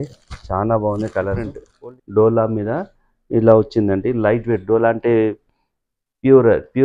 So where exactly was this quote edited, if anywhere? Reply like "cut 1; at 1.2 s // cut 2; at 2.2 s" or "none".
cut 1; at 1.6 s